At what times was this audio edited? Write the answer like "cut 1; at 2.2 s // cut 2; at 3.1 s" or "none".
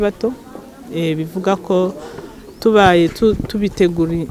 none